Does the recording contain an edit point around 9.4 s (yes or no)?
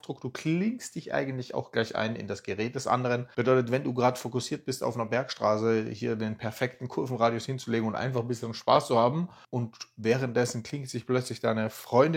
no